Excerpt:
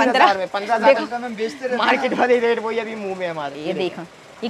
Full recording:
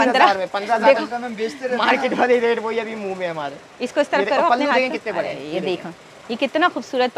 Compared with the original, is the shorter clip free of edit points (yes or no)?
no